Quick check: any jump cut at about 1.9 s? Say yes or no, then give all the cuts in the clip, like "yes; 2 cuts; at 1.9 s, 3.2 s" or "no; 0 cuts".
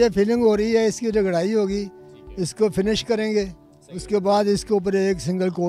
no; 0 cuts